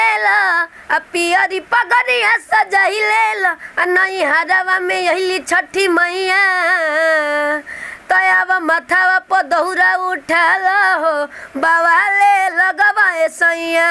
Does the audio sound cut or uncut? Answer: uncut